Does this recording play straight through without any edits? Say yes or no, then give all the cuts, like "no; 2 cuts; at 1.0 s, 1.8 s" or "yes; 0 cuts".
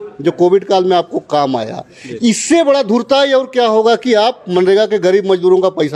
yes; 0 cuts